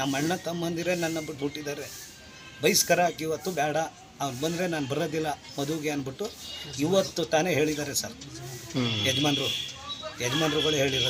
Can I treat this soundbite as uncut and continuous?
yes; 0 cuts

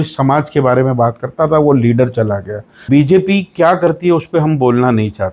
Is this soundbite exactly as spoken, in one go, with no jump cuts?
no; 1 cut; at 2.8 s

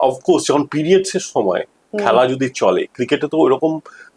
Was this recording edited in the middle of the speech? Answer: no; 0 cuts

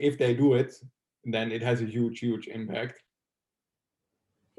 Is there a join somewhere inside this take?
no; 0 cuts

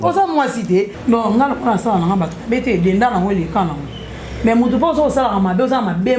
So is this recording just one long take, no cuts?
no; 1 cut; at 0.9 s

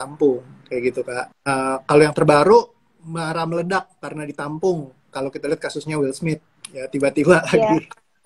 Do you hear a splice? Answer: yes; 1 cut; at 1.3 s

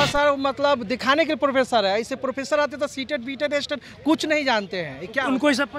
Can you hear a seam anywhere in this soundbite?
no; 0 cuts

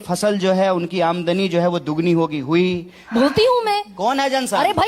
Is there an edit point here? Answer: yes; 1 cut; at 3.0 s

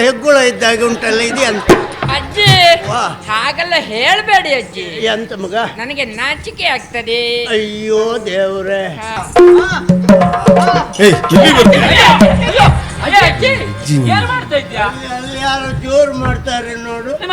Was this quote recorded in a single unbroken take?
no; 1 cut; at 9.2 s

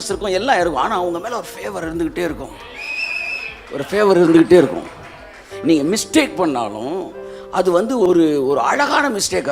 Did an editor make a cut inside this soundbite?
yes; 1 cut; at 8.1 s

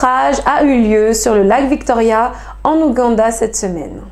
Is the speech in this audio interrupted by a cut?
no; 0 cuts

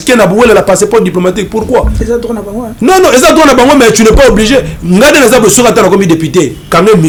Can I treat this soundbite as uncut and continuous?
yes; 0 cuts

